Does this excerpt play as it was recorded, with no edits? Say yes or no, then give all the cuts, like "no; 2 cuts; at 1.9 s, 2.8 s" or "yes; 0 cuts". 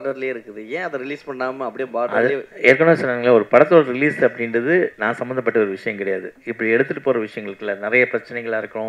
yes; 0 cuts